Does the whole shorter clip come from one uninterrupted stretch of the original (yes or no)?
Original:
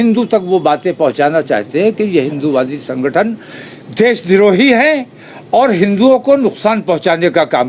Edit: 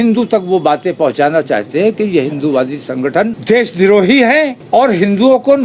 no